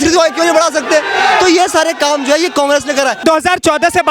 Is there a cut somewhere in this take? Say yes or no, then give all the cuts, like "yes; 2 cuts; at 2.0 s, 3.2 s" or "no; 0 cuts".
yes; 1 cut; at 3.2 s